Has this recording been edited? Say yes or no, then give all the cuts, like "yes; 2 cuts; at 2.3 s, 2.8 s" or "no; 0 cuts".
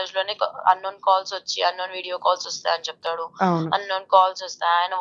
no; 0 cuts